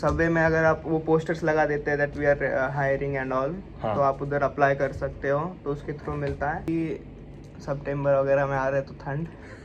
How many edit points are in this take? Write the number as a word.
one